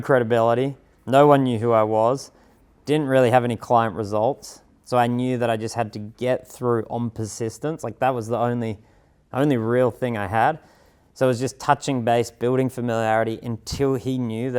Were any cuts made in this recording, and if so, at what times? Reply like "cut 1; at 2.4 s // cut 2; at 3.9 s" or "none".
none